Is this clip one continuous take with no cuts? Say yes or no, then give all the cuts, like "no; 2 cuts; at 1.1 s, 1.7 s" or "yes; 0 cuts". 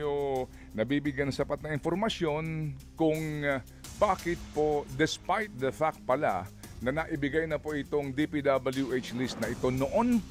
yes; 0 cuts